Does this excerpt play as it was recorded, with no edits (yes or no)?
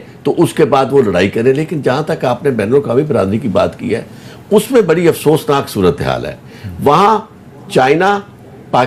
yes